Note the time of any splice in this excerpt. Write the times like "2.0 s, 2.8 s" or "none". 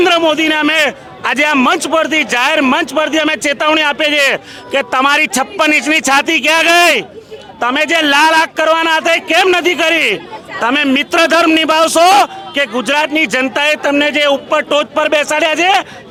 none